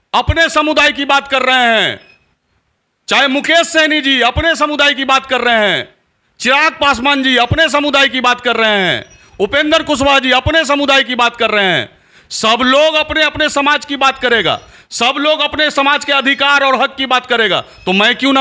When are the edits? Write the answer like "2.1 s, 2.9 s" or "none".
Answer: none